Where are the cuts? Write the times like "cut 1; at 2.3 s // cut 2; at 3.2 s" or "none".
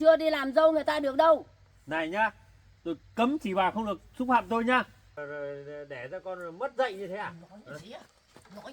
cut 1; at 5.2 s